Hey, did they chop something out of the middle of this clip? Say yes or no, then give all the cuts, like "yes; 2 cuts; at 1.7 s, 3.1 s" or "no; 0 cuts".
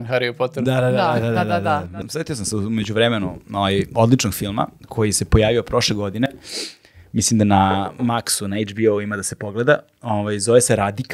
yes; 1 cut; at 1.9 s